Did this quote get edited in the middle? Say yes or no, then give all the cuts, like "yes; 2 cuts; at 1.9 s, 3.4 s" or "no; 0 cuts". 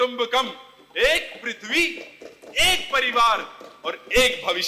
no; 0 cuts